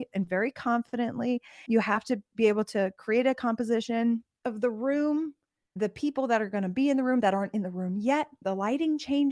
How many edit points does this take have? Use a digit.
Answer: 2